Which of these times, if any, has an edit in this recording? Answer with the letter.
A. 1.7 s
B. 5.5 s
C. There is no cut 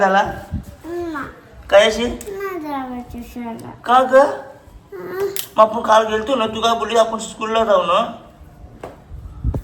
C